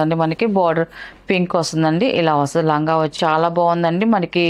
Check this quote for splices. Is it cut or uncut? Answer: cut